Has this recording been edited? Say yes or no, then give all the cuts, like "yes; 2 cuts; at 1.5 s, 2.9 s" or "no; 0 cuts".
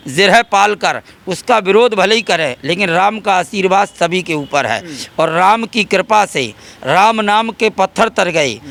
no; 0 cuts